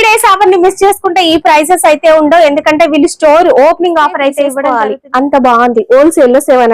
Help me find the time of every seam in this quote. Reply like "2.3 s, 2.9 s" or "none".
4.6 s